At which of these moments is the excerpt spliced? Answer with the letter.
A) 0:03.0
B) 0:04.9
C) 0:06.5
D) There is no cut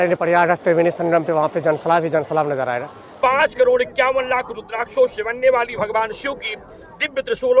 A